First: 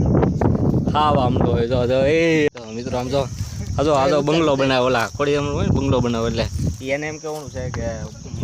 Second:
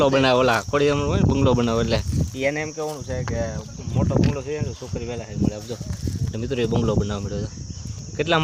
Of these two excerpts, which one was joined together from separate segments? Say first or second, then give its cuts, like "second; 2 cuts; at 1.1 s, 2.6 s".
first; 1 cut; at 2.5 s